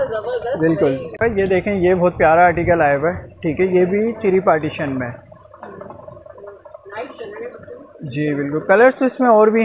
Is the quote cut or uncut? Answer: cut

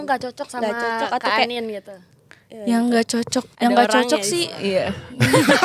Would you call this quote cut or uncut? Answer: cut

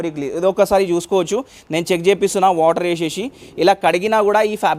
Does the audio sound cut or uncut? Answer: uncut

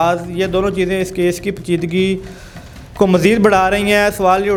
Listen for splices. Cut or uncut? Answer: uncut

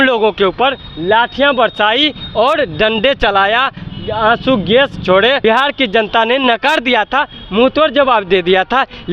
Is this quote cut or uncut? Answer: cut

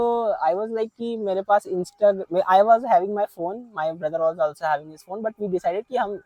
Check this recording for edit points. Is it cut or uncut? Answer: uncut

